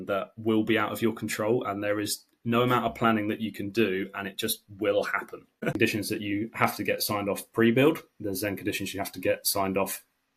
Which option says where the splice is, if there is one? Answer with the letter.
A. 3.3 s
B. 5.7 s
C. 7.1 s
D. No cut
B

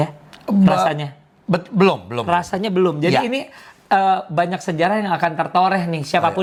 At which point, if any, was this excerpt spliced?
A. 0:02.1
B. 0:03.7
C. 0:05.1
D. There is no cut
D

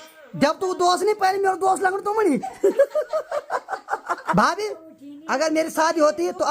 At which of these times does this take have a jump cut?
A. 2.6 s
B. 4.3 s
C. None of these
B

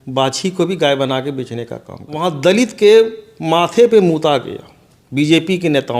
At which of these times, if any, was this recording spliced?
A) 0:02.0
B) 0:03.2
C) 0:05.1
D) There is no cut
A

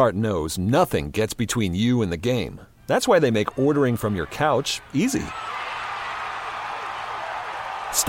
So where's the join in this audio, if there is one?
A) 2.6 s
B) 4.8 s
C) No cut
C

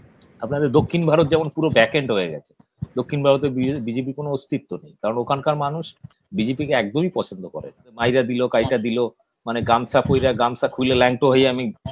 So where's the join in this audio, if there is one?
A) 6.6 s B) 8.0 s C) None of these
B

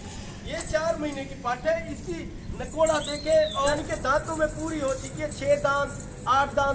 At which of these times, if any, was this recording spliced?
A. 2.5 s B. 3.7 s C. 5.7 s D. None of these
B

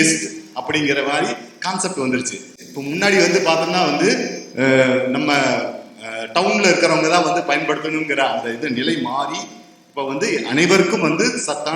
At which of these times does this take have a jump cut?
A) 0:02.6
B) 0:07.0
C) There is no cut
C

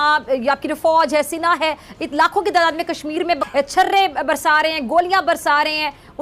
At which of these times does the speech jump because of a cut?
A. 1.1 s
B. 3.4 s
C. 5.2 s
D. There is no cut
B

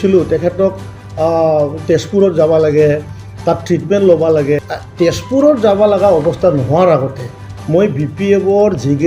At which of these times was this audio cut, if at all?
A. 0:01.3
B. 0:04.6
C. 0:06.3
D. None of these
B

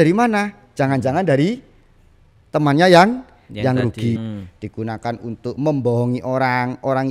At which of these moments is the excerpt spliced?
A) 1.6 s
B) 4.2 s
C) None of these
B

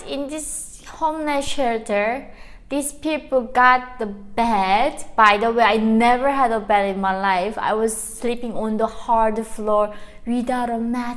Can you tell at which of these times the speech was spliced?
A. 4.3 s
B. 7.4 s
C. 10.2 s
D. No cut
D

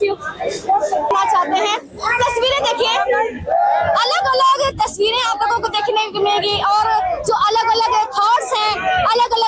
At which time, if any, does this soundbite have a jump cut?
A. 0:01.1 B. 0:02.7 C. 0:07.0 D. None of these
A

